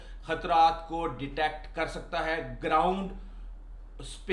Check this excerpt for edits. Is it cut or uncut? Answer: uncut